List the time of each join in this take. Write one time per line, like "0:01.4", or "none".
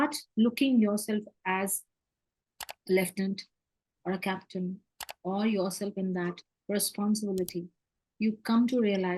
none